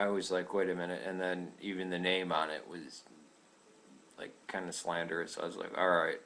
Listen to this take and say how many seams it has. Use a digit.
1